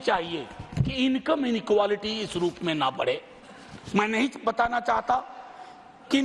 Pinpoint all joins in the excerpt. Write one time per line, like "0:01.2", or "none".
none